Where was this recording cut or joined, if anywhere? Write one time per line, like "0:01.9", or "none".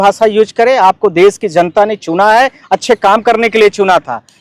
none